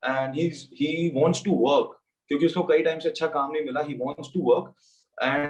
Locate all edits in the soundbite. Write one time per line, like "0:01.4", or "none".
none

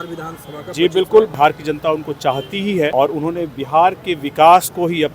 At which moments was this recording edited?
0:01.3
0:02.9

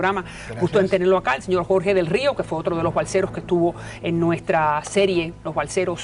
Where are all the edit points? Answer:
none

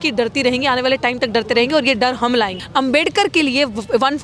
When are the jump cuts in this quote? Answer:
0:02.6

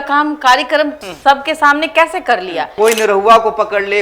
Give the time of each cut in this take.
0:01.1
0:02.7

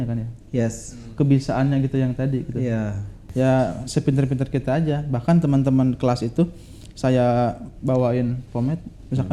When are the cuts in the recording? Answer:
0:03.1

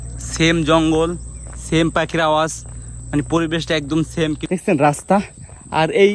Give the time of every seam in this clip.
0:04.5

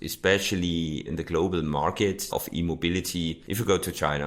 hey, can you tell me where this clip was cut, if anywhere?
0:01.1
0:02.3
0:03.4

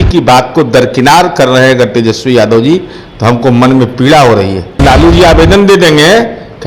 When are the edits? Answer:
0:04.8

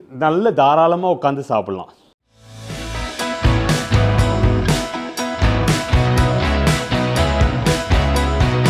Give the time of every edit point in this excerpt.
none

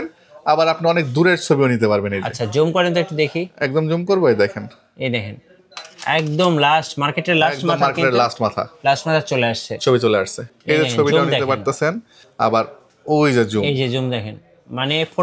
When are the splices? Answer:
0:10.4

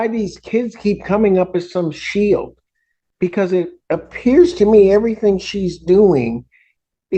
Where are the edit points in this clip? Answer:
none

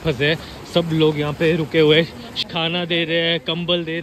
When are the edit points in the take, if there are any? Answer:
0:02.4

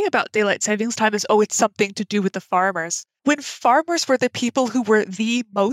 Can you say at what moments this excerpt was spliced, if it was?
none

